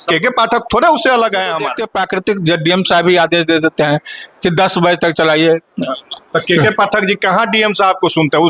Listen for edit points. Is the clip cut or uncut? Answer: cut